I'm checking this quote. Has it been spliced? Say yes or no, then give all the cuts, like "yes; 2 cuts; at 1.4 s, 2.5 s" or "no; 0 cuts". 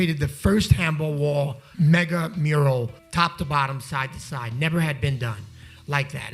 yes; 2 cuts; at 1.6 s, 3.0 s